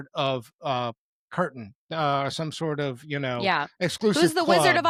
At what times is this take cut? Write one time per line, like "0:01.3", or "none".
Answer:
none